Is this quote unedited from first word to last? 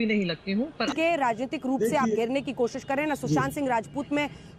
no; 1 cut; at 0.9 s

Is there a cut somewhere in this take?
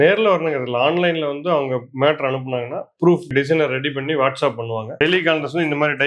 yes; 1 cut; at 4.9 s

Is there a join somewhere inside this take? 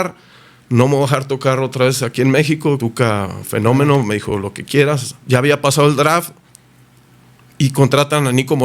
yes; 2 cuts; at 2.8 s, 5.1 s

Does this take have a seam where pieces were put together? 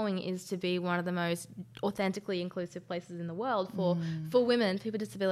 no; 0 cuts

